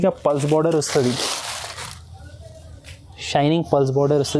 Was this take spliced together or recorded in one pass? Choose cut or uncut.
uncut